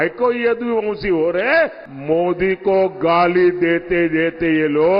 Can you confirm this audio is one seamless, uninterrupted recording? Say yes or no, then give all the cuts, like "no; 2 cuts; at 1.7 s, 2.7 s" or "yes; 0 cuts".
no; 1 cut; at 1.9 s